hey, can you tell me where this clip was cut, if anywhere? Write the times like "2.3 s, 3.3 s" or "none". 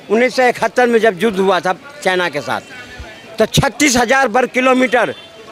none